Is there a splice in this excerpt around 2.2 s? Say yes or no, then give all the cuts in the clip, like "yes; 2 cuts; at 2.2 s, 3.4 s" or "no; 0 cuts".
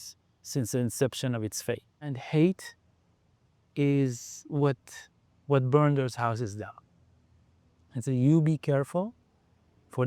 yes; 1 cut; at 2.2 s